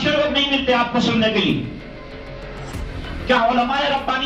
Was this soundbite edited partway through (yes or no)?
no